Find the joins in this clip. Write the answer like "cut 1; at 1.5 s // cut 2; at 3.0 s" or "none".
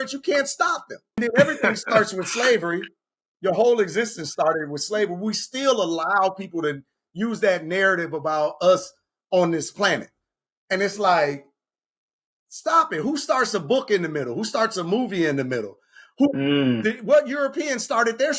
cut 1; at 1.2 s